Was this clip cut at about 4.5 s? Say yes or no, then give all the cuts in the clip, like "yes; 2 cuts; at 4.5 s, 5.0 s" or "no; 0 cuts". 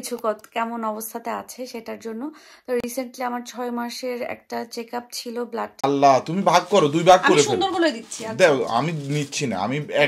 no; 1 cut; at 5.8 s